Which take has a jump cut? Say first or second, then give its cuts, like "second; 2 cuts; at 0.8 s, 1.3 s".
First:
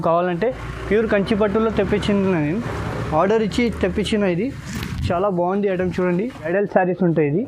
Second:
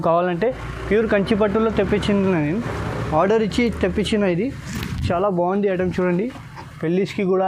first; 1 cut; at 6.5 s